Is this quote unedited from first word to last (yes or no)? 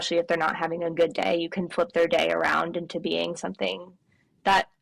yes